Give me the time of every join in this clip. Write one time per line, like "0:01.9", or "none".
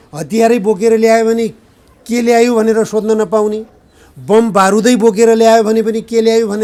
none